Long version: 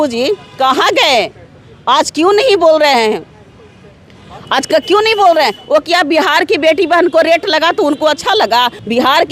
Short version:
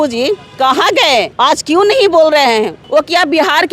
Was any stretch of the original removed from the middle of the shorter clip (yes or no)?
yes